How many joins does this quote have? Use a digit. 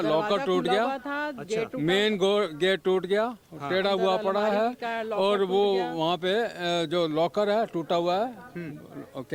0